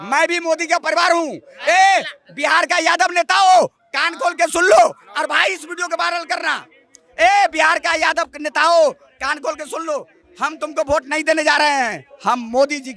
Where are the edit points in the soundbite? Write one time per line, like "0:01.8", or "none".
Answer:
none